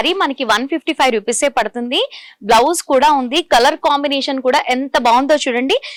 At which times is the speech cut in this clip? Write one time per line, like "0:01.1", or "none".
none